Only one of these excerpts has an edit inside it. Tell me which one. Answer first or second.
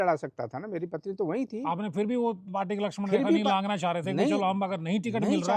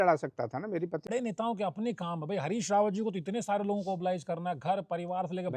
second